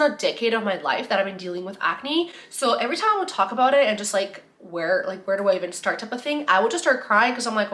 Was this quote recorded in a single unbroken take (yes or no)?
yes